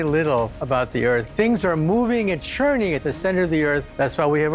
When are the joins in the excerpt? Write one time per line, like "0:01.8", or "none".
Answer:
0:01.3